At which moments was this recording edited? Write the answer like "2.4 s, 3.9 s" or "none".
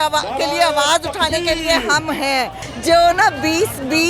2.7 s